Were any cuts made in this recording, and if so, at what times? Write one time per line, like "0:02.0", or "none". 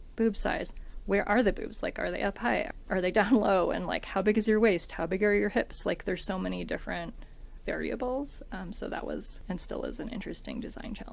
0:02.7
0:09.3

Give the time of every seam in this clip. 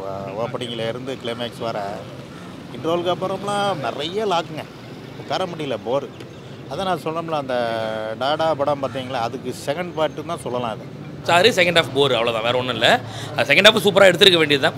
0:11.2

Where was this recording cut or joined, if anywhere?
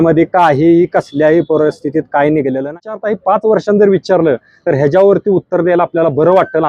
0:02.9

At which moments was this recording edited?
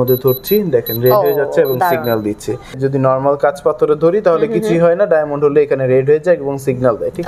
0:02.8

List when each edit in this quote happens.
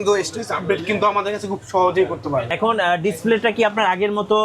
0:02.5

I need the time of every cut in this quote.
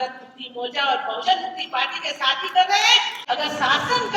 0:03.1

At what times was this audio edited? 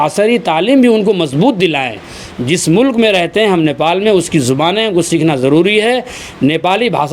none

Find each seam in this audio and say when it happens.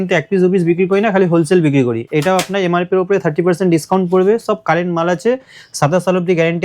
0:02.0

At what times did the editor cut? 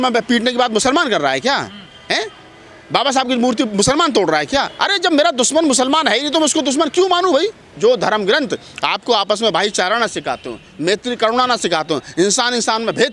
0:07.7

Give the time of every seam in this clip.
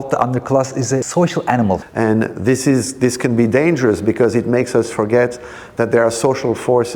0:01.1
0:01.9

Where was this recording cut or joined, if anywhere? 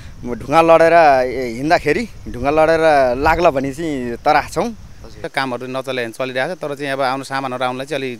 0:05.2

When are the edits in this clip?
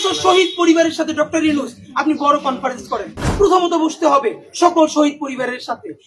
0:03.2

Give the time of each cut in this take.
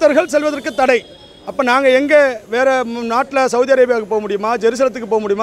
none

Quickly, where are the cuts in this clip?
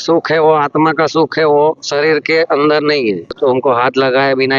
0:03.4

